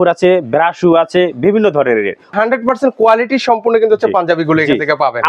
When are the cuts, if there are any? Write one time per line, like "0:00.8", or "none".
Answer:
0:02.3